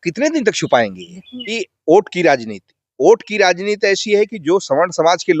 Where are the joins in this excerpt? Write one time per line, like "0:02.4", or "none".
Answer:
0:01.7